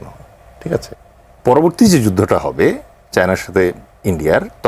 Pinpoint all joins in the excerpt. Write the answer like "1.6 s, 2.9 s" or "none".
0.9 s